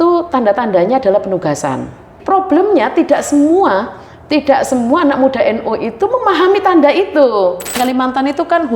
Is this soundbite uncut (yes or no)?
no